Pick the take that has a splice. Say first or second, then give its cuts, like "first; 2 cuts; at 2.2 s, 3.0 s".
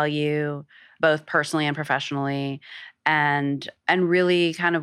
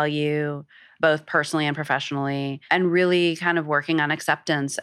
second; 1 cut; at 2.6 s